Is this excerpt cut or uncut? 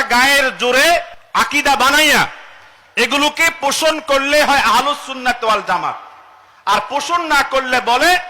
cut